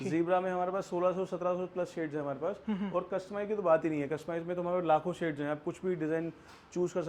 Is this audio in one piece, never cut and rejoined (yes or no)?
yes